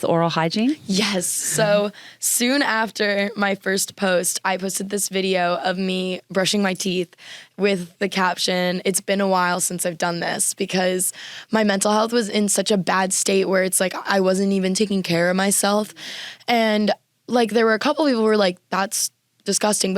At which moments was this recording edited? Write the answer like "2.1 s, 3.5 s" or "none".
none